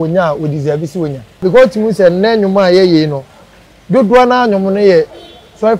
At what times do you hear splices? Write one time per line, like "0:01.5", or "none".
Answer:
0:01.4